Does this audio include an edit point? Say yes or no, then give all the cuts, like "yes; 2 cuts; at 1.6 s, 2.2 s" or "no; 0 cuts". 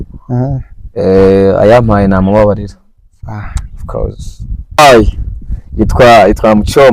yes; 1 cut; at 4.8 s